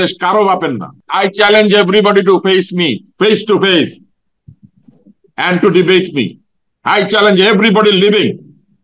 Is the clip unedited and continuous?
no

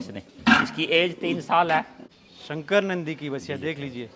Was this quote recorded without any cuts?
no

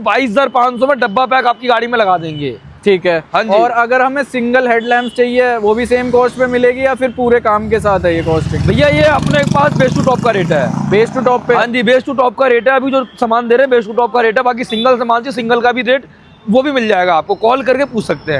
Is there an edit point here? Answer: no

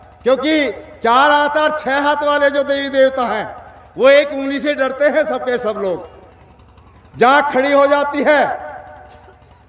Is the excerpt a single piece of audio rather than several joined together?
yes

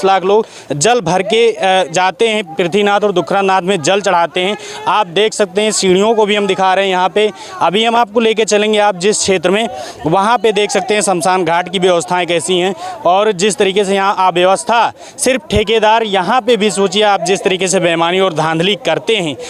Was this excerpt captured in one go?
yes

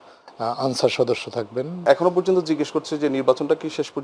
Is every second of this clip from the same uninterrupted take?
no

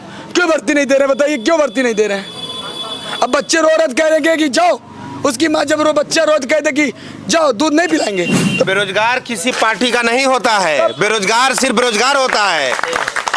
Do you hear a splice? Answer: yes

